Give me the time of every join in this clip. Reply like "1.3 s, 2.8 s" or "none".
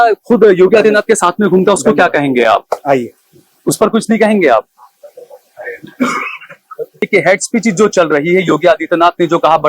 7.0 s